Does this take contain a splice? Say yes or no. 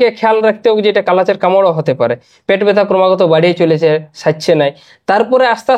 no